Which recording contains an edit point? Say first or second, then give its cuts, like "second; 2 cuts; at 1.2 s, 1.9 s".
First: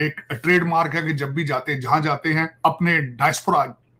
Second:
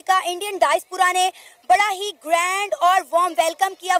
first; 1 cut; at 2.6 s